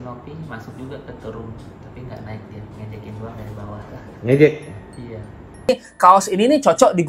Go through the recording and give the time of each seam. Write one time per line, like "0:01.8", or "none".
0:05.7

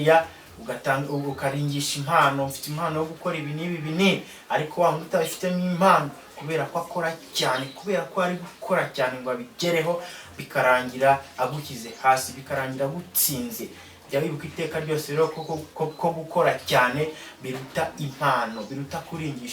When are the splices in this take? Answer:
none

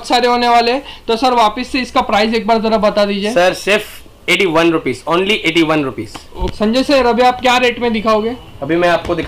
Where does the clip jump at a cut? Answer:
none

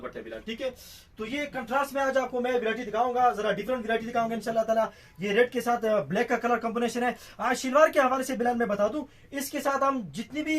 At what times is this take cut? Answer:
none

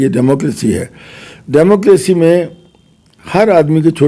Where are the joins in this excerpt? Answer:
none

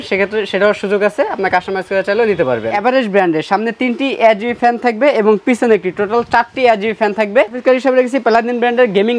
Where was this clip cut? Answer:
0:02.8
0:07.6

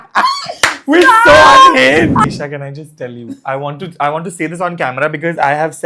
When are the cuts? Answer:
0:02.2

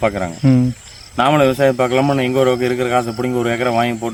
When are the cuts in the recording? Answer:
none

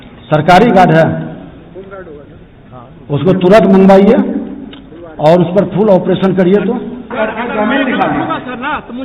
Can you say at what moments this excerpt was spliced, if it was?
0:07.1

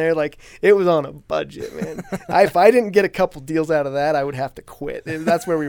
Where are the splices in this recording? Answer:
none

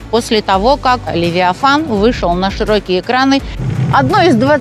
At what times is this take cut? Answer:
0:01.1
0:03.5

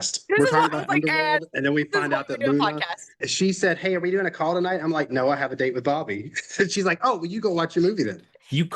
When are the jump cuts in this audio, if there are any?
0:03.3

